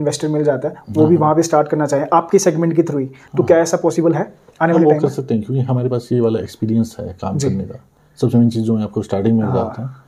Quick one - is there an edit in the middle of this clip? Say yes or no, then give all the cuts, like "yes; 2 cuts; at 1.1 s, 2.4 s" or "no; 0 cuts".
no; 0 cuts